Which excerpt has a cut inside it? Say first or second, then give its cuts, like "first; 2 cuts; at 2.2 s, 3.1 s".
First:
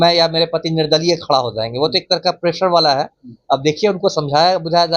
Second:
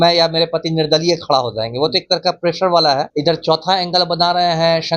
second; 1 cut; at 3.1 s